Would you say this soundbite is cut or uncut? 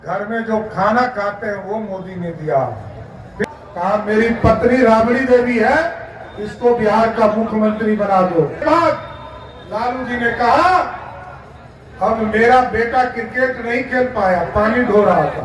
cut